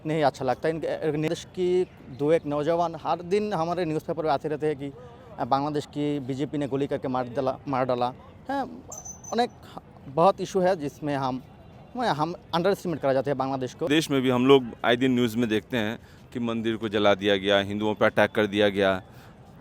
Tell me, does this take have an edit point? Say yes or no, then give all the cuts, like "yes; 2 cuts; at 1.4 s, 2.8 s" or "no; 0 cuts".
yes; 2 cuts; at 1.3 s, 13.9 s